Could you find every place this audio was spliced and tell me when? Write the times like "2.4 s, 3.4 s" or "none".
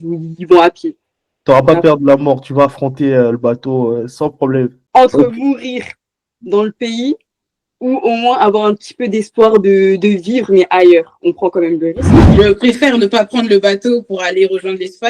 12.2 s

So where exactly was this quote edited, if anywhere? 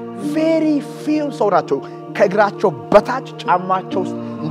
none

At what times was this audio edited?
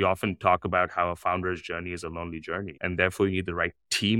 2.7 s

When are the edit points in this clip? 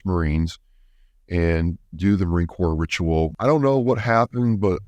3.3 s

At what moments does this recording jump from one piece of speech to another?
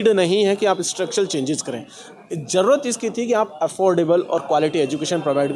none

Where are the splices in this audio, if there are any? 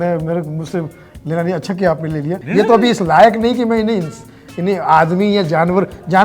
2.4 s

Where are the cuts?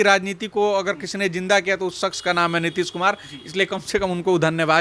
none

